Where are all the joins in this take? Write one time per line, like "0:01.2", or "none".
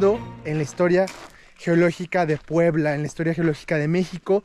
none